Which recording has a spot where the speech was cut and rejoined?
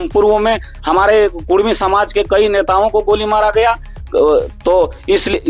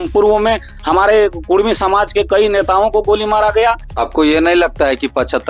second; 1 cut; at 3.9 s

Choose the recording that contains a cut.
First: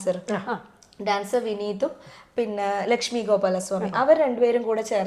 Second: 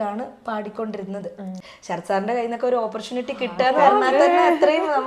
second; 1 cut; at 1.6 s

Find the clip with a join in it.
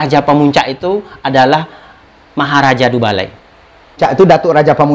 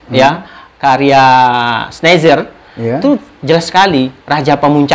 first; 1 cut; at 4.0 s

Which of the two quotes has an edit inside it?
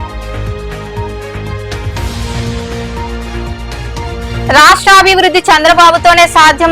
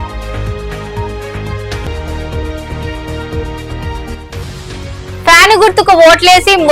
first; 1 cut; at 1.6 s

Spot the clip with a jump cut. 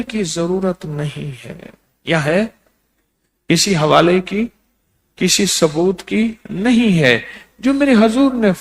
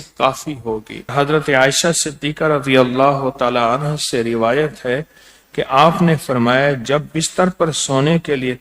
second; 1 cut; at 0.9 s

